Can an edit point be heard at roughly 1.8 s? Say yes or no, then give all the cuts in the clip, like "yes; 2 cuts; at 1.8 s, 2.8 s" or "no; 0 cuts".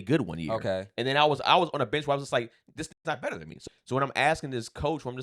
no; 1 cut; at 3.5 s